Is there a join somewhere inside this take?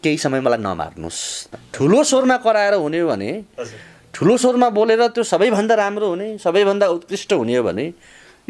yes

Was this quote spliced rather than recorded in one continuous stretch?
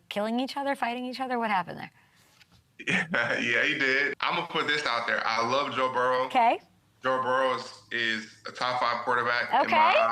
yes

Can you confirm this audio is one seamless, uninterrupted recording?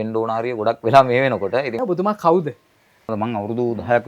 no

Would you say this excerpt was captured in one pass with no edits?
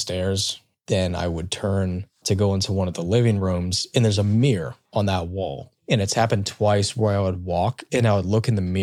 yes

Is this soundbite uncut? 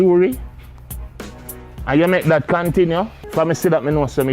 no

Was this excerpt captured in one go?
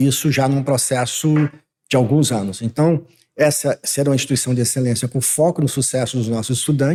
yes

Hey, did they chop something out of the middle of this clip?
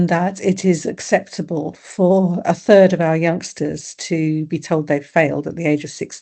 no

